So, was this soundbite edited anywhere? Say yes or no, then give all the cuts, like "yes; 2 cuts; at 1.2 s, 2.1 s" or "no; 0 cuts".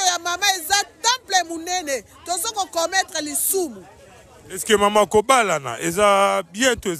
no; 0 cuts